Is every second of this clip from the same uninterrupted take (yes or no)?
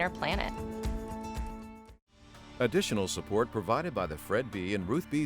no